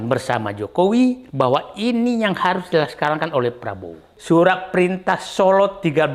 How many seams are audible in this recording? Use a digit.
2